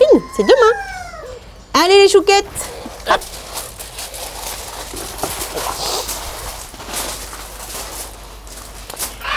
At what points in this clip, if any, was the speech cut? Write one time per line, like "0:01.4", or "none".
none